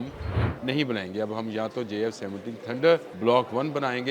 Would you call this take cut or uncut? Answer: cut